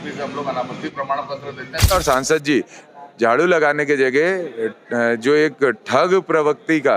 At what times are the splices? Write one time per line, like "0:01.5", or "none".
0:01.9